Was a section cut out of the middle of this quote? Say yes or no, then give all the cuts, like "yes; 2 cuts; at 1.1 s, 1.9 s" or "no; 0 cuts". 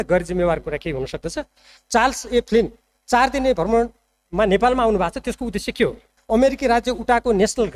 yes; 2 cuts; at 1.7 s, 6.1 s